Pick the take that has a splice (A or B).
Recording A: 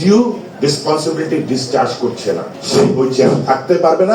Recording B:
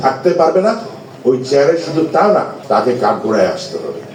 A